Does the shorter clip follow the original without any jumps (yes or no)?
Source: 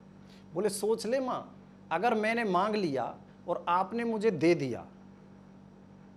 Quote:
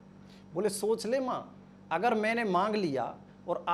yes